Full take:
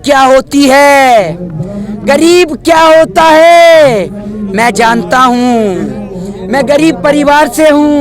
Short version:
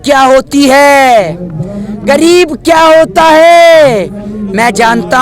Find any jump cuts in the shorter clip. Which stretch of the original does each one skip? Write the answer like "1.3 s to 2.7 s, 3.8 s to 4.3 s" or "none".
none